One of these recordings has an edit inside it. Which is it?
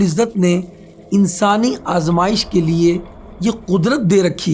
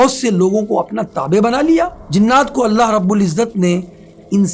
second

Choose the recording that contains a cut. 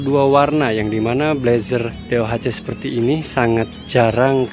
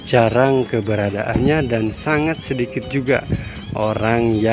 first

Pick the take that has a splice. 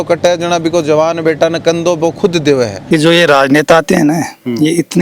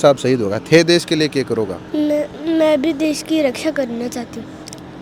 first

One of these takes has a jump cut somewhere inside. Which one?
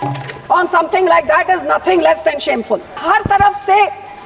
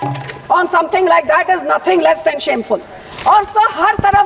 first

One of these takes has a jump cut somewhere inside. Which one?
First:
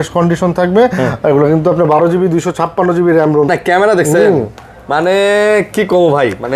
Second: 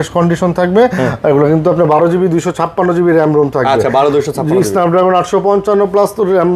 first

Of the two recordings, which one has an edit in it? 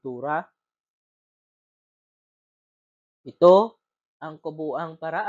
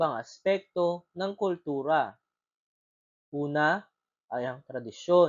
first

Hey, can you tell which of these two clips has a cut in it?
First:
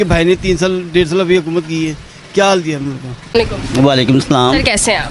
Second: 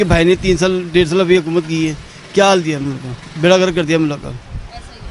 first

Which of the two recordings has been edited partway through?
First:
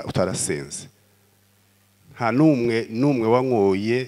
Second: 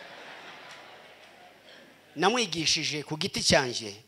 second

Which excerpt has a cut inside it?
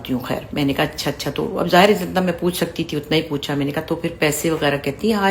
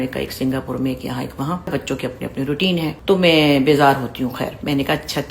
second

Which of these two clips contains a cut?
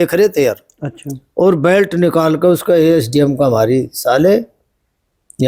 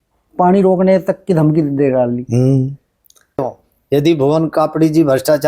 second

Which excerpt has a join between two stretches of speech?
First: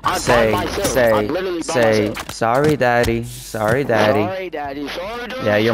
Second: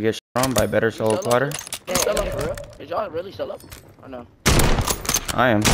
second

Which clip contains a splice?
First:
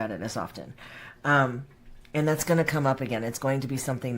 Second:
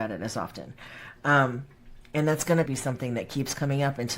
second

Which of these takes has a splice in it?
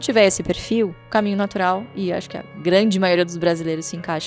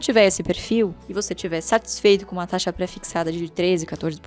first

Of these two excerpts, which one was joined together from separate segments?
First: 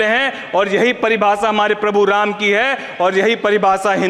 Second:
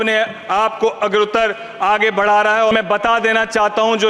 second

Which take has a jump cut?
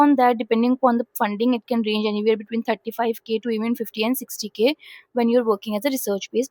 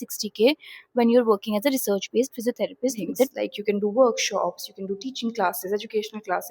second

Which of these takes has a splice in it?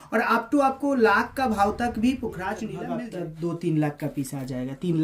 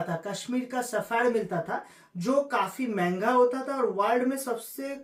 first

